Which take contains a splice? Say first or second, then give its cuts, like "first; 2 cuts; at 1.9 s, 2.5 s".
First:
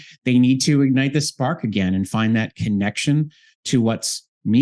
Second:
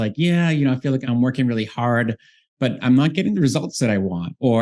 second; 2 cuts; at 1.0 s, 2.8 s